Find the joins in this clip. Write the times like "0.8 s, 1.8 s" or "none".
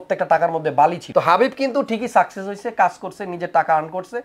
1.0 s